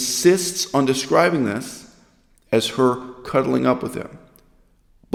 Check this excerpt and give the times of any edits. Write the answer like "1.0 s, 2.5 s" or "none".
none